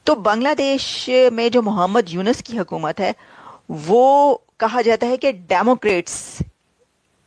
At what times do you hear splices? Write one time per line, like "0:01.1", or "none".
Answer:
none